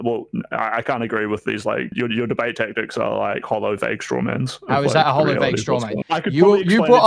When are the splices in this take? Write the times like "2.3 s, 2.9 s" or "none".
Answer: 1.9 s, 5.9 s